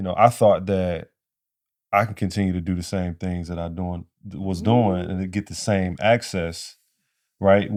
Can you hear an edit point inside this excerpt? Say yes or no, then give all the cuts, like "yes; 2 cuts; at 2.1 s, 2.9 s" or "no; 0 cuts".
no; 0 cuts